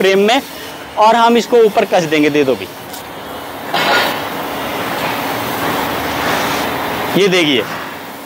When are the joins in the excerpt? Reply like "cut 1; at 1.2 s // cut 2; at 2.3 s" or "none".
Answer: none